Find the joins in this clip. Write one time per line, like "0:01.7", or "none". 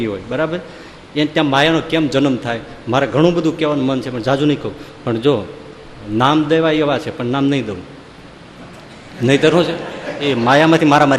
none